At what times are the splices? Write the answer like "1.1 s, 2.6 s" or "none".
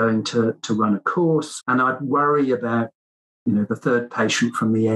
1.6 s